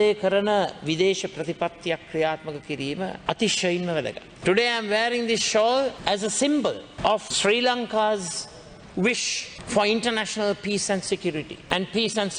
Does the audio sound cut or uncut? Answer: cut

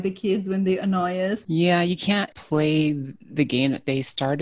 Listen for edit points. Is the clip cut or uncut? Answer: cut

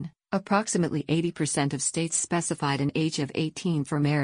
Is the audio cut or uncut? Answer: cut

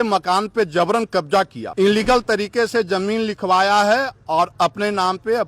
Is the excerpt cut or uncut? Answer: cut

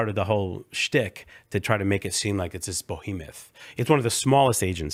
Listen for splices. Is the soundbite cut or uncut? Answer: uncut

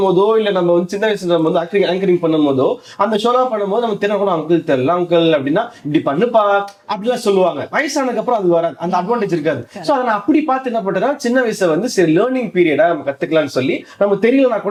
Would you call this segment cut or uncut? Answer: uncut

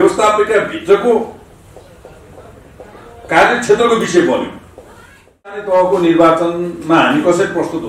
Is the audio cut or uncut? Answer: cut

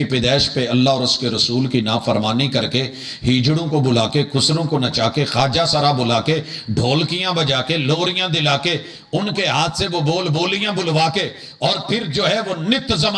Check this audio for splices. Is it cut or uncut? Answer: uncut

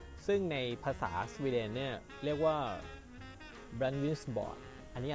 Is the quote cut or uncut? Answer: uncut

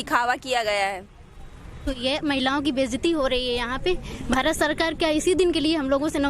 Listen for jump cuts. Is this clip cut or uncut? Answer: cut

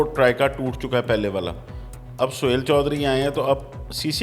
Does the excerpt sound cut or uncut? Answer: uncut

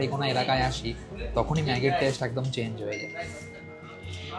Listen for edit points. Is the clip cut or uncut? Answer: uncut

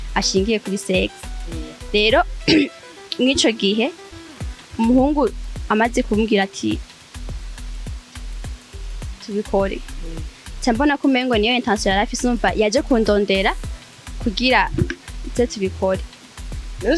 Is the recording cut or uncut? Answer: uncut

